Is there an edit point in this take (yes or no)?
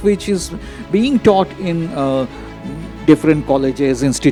no